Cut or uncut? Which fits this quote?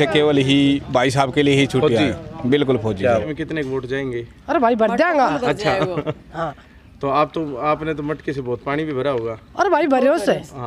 cut